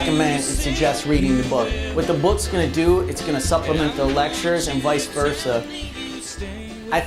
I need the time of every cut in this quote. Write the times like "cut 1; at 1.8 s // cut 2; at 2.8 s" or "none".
cut 1; at 3.9 s